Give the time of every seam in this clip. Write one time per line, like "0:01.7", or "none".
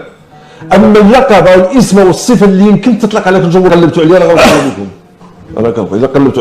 0:03.7